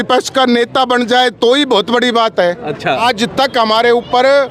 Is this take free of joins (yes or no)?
no